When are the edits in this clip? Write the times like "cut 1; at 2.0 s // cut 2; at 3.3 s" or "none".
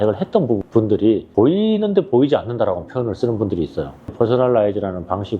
cut 1; at 1.2 s // cut 2; at 4.1 s